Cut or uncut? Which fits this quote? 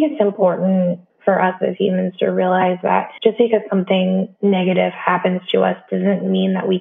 cut